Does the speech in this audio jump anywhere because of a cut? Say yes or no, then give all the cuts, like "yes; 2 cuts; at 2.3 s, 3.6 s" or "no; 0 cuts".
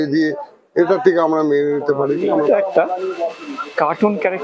yes; 1 cut; at 2.4 s